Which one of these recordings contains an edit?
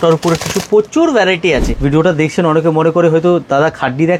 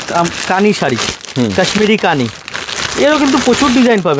first; 1 cut; at 1.7 s

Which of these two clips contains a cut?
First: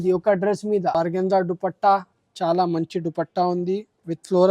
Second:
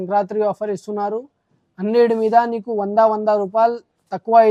first; 1 cut; at 1.0 s

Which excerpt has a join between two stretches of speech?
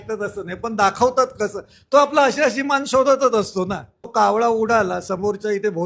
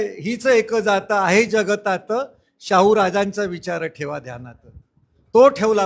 first; 1 cut; at 3.5 s

